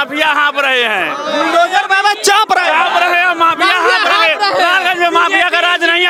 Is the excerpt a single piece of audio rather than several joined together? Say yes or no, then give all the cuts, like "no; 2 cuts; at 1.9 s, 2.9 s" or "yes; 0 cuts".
yes; 0 cuts